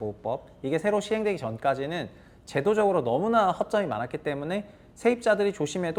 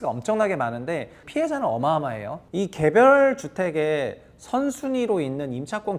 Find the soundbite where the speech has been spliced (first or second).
second